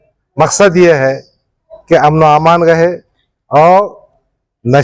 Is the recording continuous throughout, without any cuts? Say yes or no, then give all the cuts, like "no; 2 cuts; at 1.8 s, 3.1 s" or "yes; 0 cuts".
yes; 0 cuts